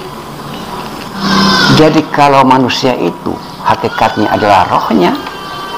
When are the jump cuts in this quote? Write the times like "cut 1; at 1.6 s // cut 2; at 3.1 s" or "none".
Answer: cut 1; at 1.2 s